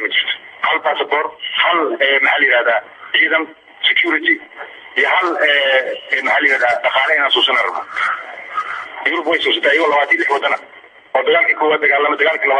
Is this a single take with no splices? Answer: yes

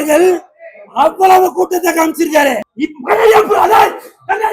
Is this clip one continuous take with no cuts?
no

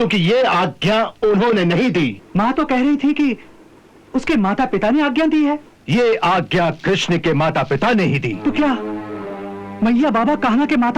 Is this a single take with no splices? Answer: no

